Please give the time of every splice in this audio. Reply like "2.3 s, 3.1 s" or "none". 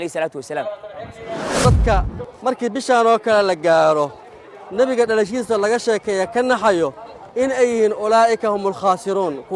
none

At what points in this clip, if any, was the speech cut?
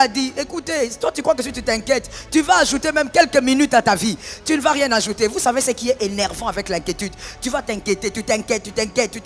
none

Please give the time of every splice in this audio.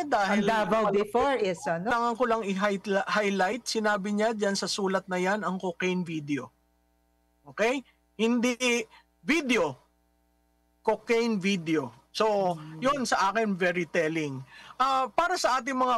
1.9 s

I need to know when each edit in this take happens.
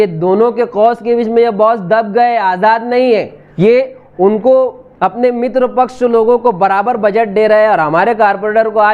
3.4 s

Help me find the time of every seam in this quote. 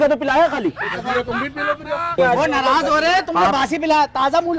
2.2 s

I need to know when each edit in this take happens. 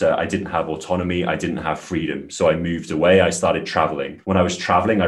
none

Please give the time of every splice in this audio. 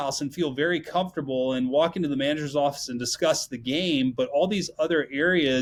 none

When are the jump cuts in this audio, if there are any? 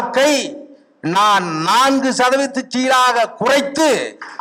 none

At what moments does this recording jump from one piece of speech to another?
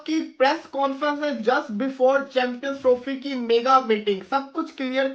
none

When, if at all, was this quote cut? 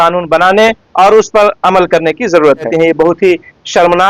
2.7 s

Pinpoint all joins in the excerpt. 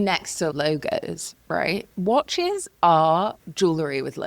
1.9 s

